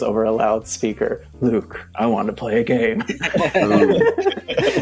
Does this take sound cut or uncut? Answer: uncut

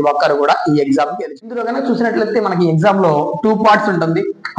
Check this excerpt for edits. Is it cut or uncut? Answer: cut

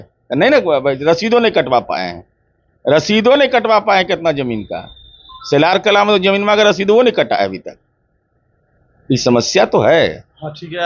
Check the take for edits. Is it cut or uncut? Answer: uncut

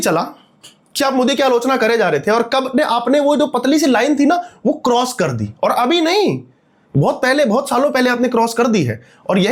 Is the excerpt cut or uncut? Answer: uncut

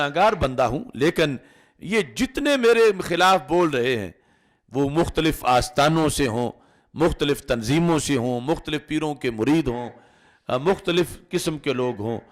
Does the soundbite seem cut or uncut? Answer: uncut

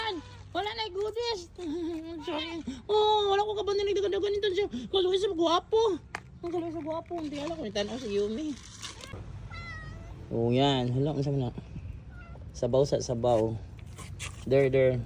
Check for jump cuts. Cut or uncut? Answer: cut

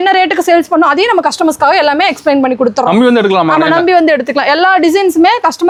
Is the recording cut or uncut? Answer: uncut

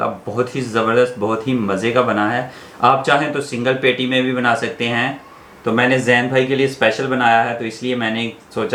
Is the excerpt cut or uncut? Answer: uncut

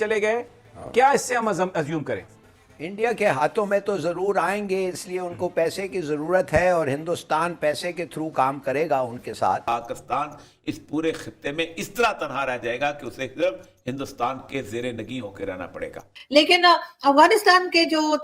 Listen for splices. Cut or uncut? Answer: cut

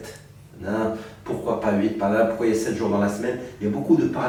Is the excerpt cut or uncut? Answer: uncut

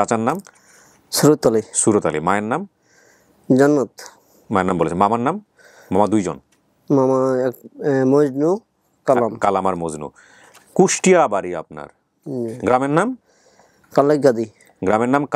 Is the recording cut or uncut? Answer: uncut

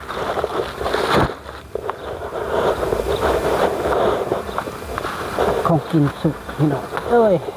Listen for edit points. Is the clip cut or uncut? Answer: uncut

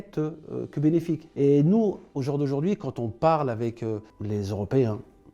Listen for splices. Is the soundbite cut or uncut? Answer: cut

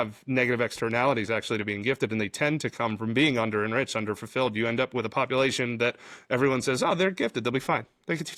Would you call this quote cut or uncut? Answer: uncut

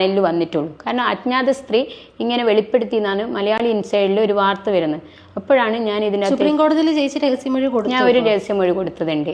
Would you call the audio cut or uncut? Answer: uncut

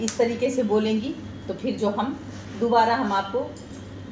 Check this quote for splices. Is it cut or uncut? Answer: uncut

